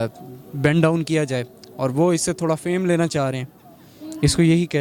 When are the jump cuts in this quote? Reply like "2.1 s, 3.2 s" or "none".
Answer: none